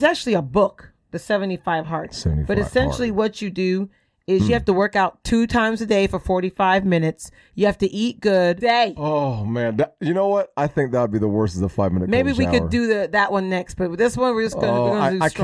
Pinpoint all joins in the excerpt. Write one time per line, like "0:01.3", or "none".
0:08.6